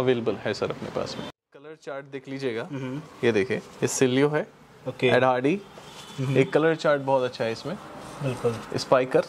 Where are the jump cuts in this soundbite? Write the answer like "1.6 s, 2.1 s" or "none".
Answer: 1.2 s

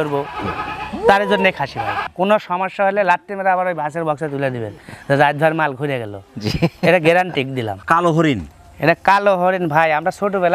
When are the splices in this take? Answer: 2.0 s, 7.8 s

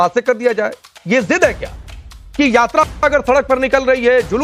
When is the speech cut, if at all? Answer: none

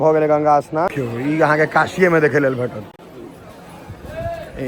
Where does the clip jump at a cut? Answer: 0.9 s

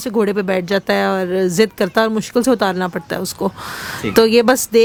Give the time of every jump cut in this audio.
none

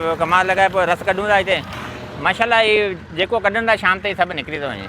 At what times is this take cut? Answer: 1.7 s

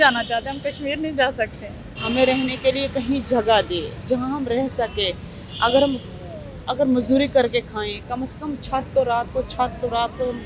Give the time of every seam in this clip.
2.0 s

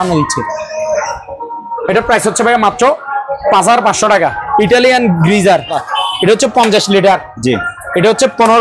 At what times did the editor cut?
4.4 s, 5.8 s

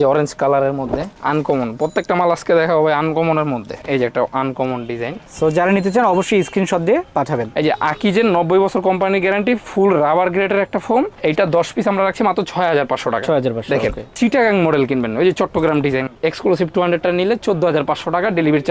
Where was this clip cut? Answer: 3.7 s, 7.5 s, 14.1 s

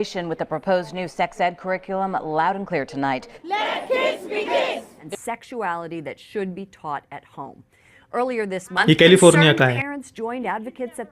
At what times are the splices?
3.3 s, 4.9 s

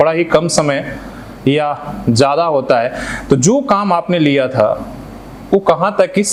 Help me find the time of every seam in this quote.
none

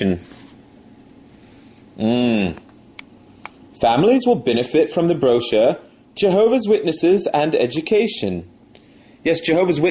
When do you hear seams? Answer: 5.2 s

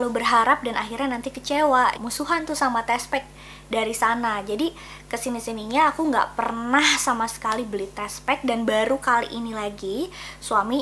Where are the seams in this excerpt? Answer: 2.0 s

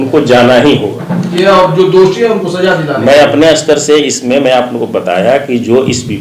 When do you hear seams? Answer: 1.3 s

